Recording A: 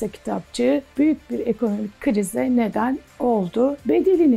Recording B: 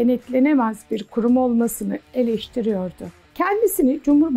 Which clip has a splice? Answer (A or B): B